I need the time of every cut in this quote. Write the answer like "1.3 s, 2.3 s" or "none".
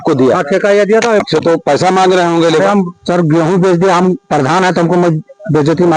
1.2 s